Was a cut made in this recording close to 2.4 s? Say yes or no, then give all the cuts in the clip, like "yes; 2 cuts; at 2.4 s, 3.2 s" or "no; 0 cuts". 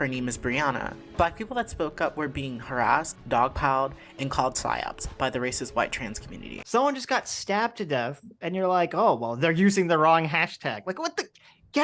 no; 1 cut; at 6.6 s